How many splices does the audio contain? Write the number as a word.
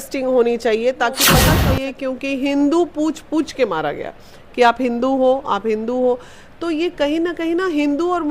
one